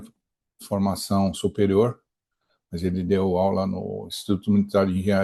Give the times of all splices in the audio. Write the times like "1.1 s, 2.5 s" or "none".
none